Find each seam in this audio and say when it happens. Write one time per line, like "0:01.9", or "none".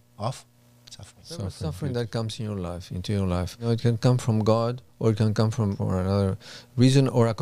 0:01.7
0:03.7
0:05.8